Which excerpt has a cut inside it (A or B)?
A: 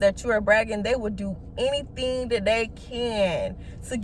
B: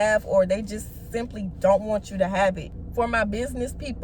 B